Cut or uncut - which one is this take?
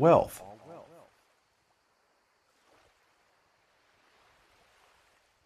uncut